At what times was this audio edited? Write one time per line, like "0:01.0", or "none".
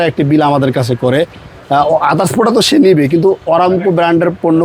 none